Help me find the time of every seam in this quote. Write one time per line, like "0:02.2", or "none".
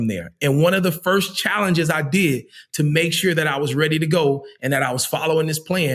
none